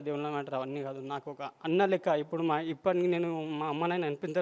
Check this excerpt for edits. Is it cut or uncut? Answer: uncut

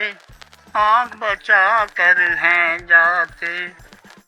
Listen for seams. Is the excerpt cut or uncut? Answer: uncut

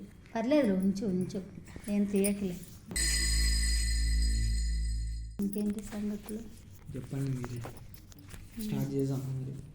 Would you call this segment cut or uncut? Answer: uncut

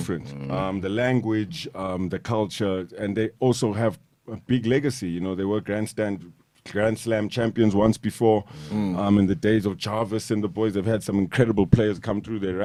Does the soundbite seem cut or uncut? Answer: uncut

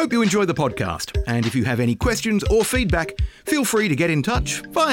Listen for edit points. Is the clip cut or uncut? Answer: uncut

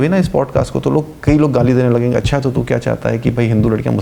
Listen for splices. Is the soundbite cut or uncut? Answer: uncut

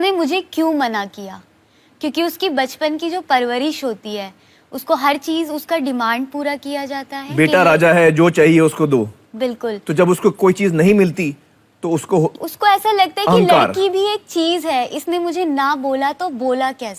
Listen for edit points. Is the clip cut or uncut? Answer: uncut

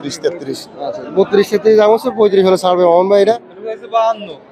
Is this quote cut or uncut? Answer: cut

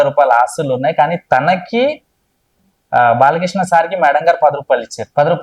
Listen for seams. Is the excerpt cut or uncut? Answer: uncut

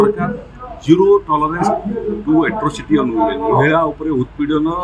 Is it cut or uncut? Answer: uncut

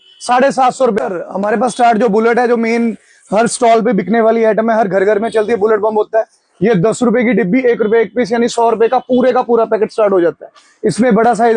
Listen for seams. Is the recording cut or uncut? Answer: cut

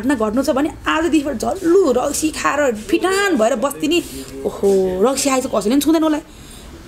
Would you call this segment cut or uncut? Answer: uncut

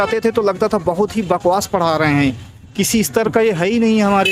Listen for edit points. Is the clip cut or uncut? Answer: uncut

